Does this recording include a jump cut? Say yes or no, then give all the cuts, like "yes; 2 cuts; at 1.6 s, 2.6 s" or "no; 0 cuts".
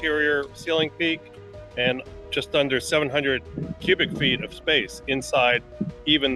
no; 0 cuts